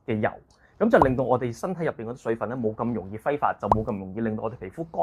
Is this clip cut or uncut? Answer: uncut